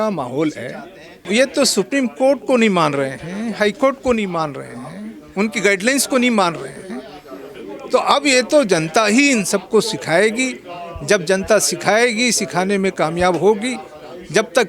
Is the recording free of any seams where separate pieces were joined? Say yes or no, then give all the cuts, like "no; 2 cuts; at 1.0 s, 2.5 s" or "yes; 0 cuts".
no; 1 cut; at 1.3 s